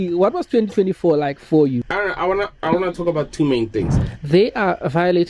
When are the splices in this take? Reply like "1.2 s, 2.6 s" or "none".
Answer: 1.8 s, 4.0 s